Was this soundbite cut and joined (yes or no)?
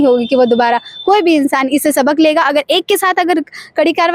no